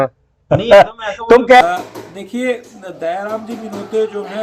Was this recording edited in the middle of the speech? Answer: yes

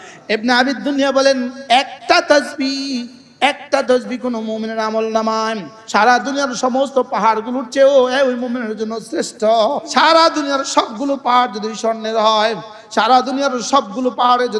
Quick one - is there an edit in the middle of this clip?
yes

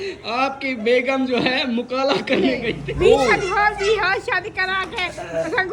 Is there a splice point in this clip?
yes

